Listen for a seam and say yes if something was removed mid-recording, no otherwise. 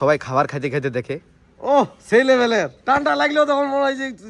yes